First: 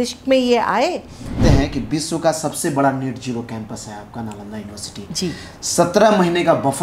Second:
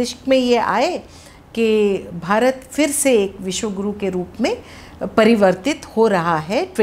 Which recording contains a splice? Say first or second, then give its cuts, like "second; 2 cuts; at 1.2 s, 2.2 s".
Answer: first; 1 cut; at 1.4 s